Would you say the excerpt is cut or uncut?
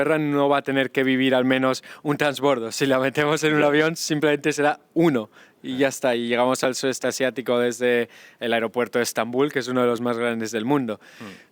uncut